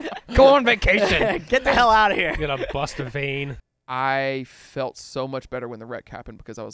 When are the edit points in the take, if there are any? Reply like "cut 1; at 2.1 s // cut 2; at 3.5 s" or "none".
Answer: cut 1; at 3.6 s